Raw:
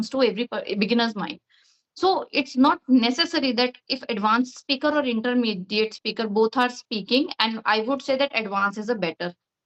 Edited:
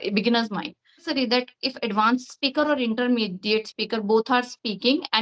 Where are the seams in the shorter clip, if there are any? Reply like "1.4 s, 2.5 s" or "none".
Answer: 1.0 s